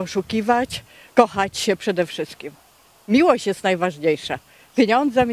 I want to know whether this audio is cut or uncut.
uncut